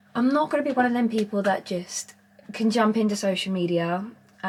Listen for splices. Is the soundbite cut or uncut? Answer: uncut